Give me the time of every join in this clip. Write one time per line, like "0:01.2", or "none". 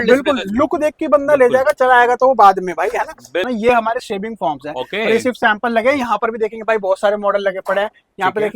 0:03.4